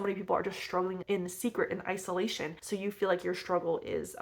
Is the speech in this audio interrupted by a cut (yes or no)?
yes